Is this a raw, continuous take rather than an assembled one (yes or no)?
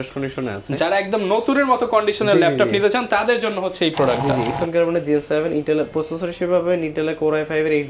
no